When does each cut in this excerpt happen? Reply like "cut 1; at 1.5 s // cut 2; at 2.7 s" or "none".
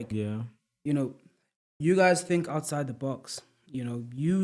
none